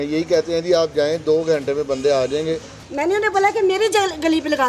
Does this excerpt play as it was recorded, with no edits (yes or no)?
no